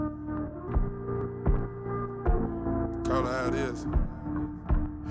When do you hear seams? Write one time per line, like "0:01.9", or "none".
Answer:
0:01.2